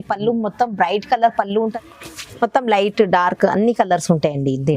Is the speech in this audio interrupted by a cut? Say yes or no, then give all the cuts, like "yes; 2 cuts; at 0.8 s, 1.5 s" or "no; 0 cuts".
yes; 1 cut; at 1.7 s